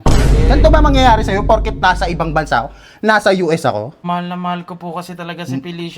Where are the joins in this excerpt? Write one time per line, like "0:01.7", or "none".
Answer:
0:04.0